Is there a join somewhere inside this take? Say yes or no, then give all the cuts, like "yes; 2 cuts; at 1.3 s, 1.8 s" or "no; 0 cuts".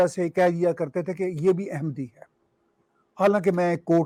no; 0 cuts